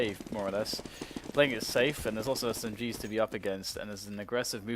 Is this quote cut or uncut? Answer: cut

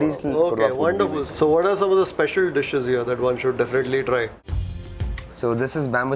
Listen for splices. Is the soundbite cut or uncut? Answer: cut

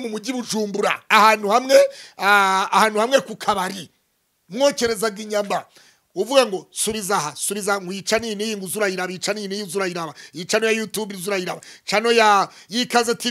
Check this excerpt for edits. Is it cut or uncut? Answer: uncut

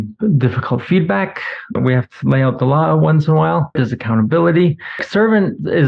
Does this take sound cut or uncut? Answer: cut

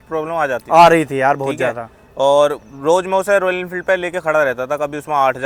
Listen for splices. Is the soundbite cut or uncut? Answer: uncut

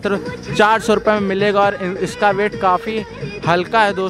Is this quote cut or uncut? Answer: uncut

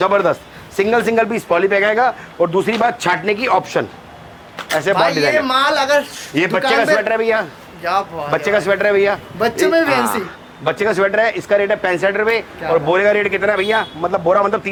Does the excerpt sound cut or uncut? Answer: uncut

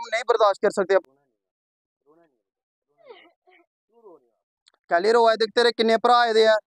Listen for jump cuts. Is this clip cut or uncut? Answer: cut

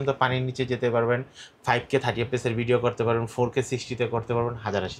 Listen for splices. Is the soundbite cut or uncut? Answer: uncut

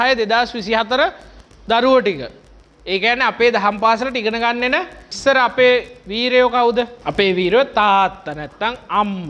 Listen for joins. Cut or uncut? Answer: cut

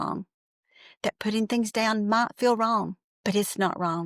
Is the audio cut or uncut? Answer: cut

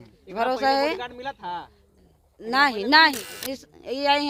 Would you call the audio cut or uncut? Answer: cut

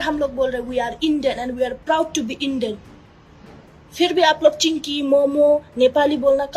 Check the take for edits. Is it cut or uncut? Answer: uncut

